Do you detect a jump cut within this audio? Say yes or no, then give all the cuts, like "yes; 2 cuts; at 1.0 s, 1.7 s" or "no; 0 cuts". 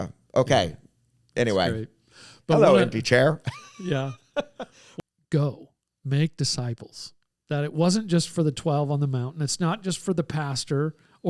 yes; 1 cut; at 4.8 s